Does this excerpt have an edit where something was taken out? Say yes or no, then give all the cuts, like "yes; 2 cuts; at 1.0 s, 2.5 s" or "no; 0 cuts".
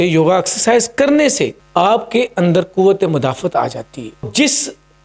yes; 2 cuts; at 1.6 s, 4.3 s